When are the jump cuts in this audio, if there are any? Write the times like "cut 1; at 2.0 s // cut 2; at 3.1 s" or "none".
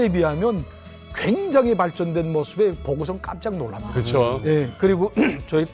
none